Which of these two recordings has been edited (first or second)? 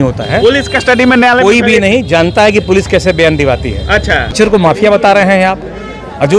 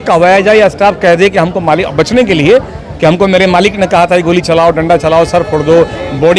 first